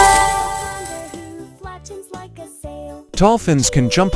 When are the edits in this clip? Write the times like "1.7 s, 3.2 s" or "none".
1.1 s, 3.1 s